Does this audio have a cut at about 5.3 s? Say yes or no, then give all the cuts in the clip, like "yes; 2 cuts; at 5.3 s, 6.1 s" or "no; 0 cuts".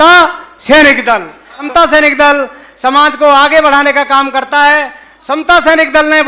no; 1 cut; at 1.6 s